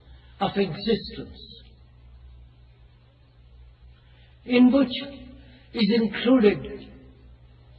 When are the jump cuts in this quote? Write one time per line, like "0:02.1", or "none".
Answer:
0:04.7